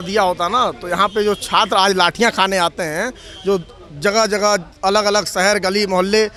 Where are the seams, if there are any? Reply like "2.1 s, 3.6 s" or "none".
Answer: none